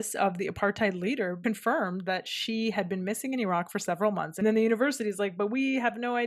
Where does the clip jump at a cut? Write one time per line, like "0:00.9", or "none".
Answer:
0:01.4
0:04.4